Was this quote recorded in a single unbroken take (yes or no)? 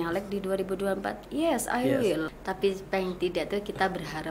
no